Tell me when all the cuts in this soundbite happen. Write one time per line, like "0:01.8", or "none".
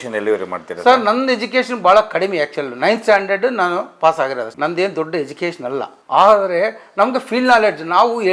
0:04.5
0:06.0